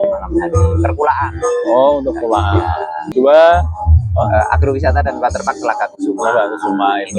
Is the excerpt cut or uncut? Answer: cut